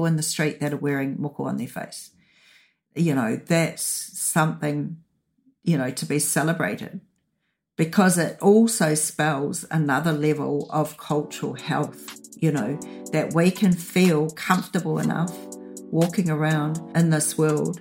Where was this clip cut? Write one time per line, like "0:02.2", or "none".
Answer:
0:16.8